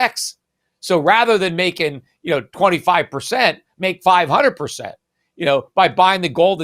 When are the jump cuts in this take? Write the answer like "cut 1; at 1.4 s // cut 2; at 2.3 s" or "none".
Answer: none

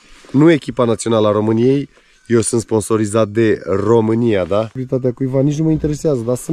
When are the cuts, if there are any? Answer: cut 1; at 4.8 s

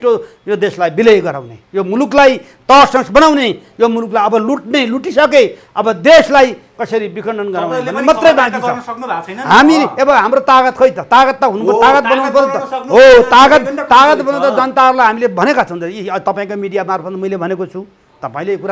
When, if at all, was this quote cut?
none

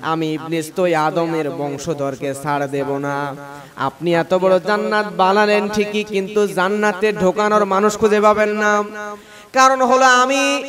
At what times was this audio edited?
none

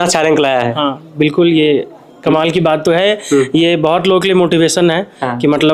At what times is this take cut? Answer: none

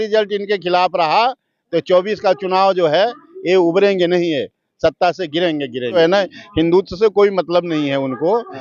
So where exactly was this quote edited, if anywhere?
cut 1; at 5.9 s

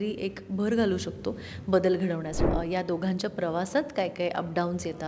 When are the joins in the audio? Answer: cut 1; at 2.4 s

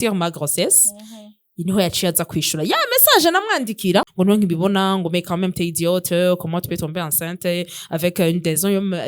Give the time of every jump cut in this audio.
cut 1; at 4.1 s

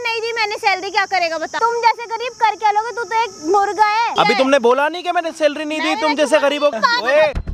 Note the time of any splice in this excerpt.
cut 1; at 1.5 s // cut 2; at 4.1 s // cut 3; at 6.8 s

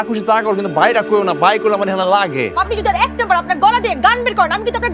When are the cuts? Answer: cut 1; at 2.6 s

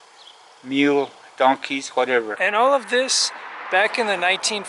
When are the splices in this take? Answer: cut 1; at 2.3 s

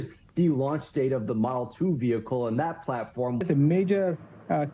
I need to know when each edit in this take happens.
cut 1; at 3.4 s

